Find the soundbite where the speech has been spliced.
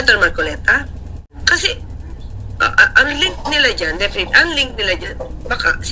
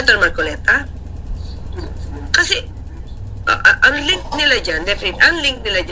first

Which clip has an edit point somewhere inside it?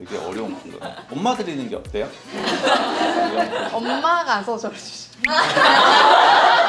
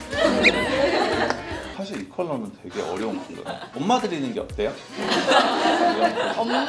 second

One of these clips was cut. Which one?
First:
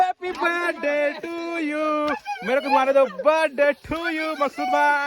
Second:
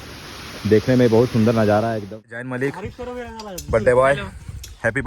second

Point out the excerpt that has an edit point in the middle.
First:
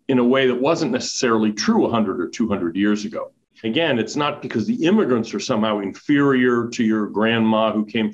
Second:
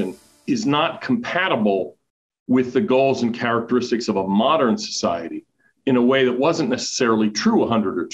first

